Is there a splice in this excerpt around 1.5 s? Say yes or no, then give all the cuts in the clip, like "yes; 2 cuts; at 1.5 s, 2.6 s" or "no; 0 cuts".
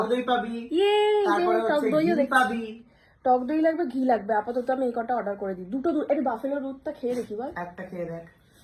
no; 0 cuts